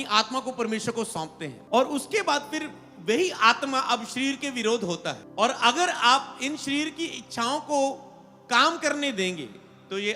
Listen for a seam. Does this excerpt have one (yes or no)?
yes